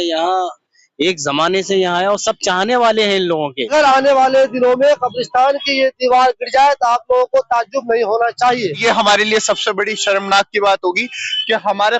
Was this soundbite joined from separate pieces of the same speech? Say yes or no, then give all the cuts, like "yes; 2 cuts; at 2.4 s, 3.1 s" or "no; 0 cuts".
yes; 2 cuts; at 3.7 s, 8.8 s